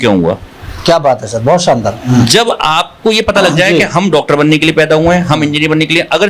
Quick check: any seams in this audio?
no; 0 cuts

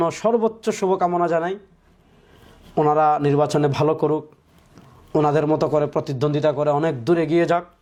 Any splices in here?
no; 0 cuts

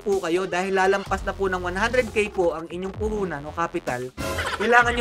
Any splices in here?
no; 0 cuts

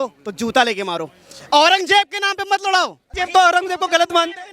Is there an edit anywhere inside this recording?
yes; 1 cut; at 3.0 s

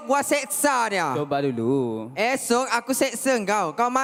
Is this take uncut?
yes; 0 cuts

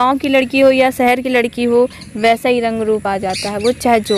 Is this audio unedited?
yes; 0 cuts

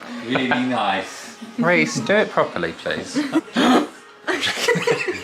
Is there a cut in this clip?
yes; 1 cut; at 3.5 s

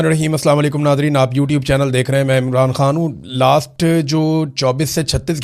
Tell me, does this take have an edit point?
no; 0 cuts

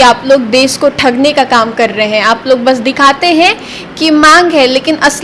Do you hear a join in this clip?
no; 0 cuts

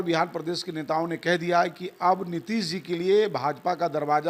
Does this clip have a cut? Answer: no; 0 cuts

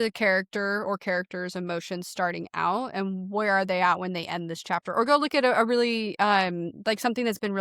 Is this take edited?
no; 0 cuts

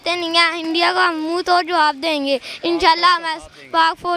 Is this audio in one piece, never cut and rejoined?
yes; 0 cuts

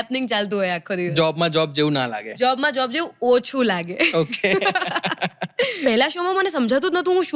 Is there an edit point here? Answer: yes; 1 cut; at 5.8 s

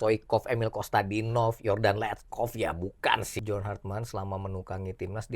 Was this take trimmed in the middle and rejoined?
yes; 1 cut; at 3.3 s

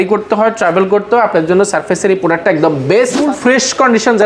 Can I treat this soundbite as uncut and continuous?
no; 1 cut; at 3.2 s

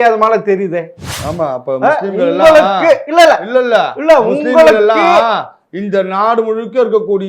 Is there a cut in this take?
yes; 1 cut; at 1.2 s

